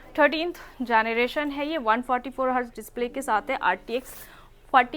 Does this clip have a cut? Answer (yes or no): no